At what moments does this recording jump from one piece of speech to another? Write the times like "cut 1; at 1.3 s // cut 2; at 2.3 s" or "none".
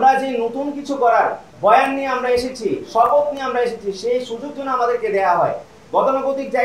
cut 1; at 1.5 s